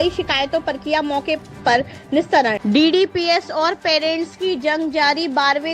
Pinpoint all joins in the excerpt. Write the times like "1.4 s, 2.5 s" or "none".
2.6 s